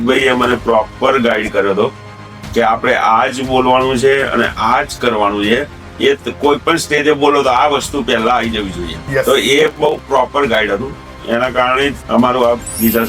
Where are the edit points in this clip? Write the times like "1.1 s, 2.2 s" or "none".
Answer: 8.9 s, 12.0 s